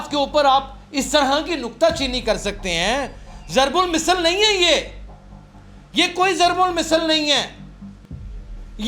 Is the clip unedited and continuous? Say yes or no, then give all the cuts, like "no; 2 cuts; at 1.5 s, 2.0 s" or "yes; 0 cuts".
yes; 0 cuts